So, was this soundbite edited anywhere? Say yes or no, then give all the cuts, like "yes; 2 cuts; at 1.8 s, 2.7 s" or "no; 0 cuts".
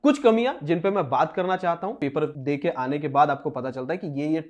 yes; 1 cut; at 2.1 s